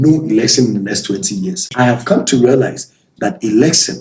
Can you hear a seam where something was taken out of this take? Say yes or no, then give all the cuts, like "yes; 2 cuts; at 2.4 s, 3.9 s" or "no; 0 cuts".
yes; 1 cut; at 1.7 s